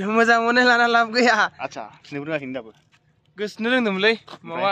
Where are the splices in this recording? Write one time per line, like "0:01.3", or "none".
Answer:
0:02.0